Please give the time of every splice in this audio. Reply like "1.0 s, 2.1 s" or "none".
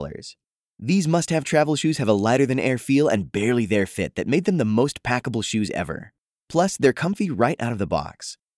none

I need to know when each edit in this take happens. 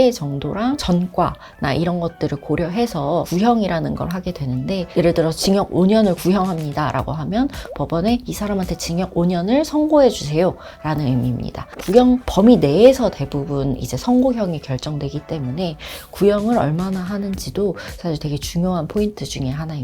0.8 s, 3.3 s, 11.8 s

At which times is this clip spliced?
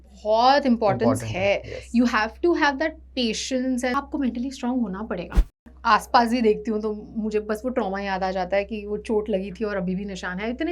3.9 s, 5.5 s

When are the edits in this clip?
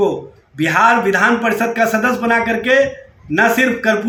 none

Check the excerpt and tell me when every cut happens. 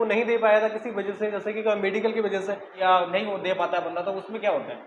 2.8 s

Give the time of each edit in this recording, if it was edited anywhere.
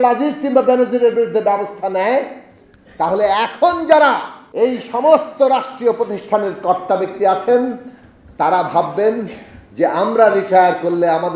4.4 s

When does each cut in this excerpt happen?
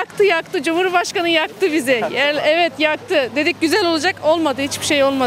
none

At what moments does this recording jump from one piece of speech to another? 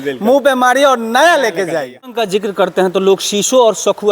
2.2 s

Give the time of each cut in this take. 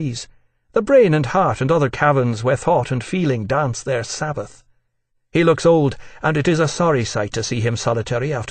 none

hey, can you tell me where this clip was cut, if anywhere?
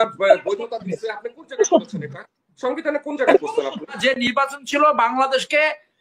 4.0 s

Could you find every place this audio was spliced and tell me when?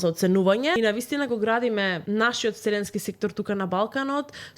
0.7 s, 2.0 s

